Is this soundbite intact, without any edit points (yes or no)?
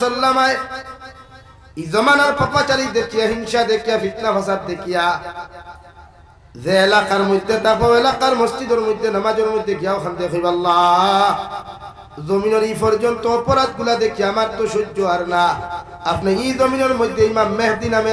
yes